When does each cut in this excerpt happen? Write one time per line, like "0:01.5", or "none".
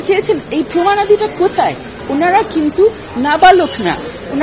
0:02.0